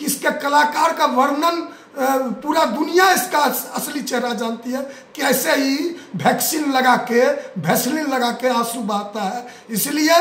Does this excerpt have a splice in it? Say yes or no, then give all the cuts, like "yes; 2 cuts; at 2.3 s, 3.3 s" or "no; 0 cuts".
no; 0 cuts